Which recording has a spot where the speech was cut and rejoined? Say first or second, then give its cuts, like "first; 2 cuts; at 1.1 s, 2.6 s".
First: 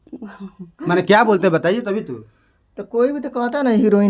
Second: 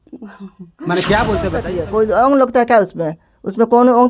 second; 1 cut; at 1.8 s